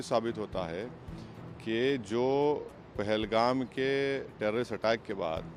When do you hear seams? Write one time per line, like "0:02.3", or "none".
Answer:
none